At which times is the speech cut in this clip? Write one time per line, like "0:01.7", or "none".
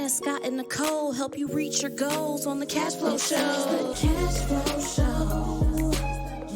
0:03.9